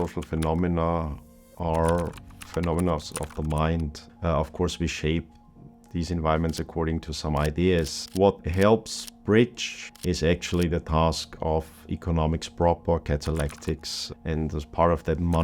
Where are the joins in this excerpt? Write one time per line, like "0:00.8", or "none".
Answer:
0:04.0
0:08.0